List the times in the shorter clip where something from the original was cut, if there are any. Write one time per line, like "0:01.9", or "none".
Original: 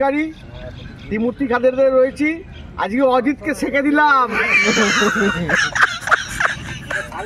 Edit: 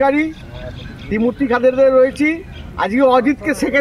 none